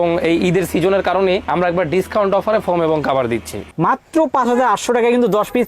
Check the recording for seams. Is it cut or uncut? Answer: cut